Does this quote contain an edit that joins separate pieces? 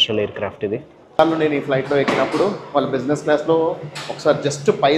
yes; 1 cut; at 1.0 s

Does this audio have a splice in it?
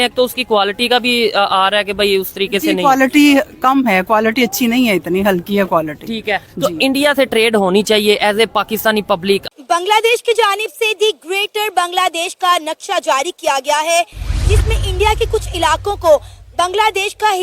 yes; 1 cut; at 9.4 s

